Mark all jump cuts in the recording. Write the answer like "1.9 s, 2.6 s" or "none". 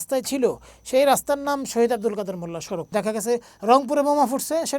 2.9 s